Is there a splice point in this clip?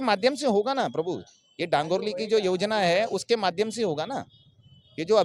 no; 0 cuts

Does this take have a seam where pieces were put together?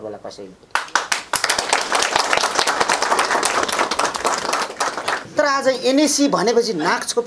yes; 1 cut; at 5.3 s

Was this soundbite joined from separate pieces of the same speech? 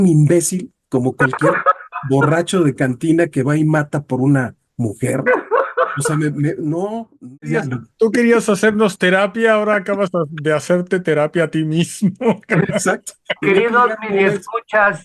yes; 1 cut; at 7.5 s

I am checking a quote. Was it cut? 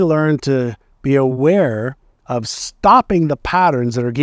no; 0 cuts

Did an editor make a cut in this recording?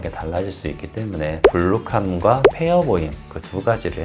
yes; 1 cut; at 1.4 s

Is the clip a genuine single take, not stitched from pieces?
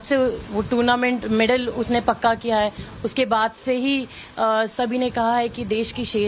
no; 1 cut; at 1.7 s

